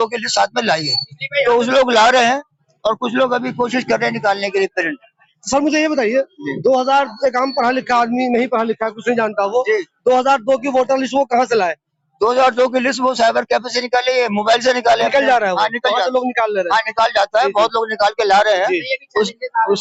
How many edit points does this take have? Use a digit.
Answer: 0